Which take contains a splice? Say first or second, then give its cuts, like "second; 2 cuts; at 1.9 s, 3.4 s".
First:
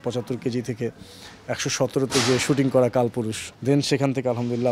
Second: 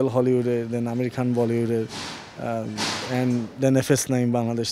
first; 1 cut; at 3.4 s